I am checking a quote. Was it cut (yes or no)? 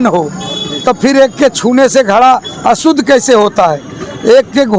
no